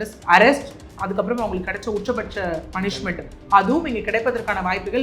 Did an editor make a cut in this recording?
no; 0 cuts

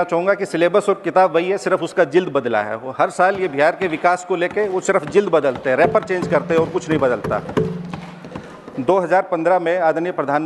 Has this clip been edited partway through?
no; 0 cuts

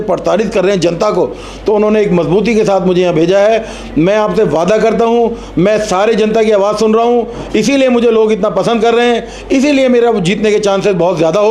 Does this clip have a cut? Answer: no; 0 cuts

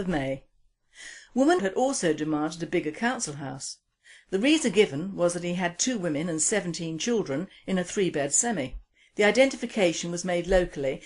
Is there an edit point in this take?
no; 0 cuts

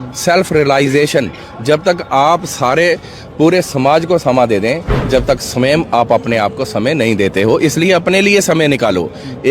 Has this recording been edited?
yes; 1 cut; at 4.9 s

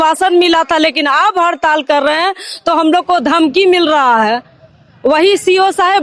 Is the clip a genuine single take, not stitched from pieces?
yes; 0 cuts

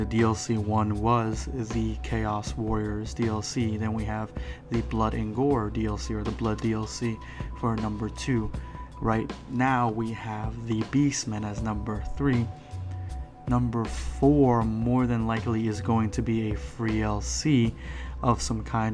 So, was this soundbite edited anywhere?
no; 0 cuts

